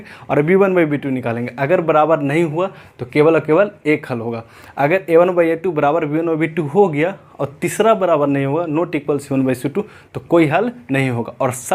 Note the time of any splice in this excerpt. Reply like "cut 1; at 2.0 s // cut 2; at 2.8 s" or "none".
none